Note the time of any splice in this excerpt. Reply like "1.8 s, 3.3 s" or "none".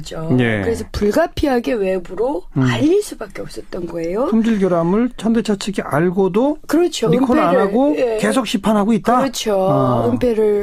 7.4 s